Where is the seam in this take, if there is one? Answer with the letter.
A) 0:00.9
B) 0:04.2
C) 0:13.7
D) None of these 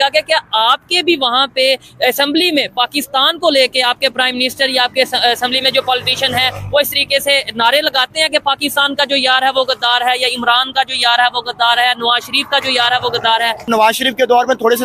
C